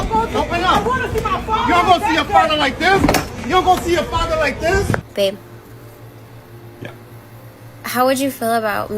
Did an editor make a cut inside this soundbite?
yes; 1 cut; at 5.0 s

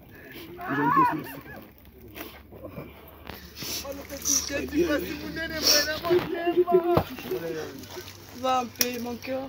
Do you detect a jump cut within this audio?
yes; 1 cut; at 7.7 s

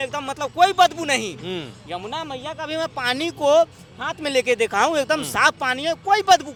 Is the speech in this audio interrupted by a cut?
no; 0 cuts

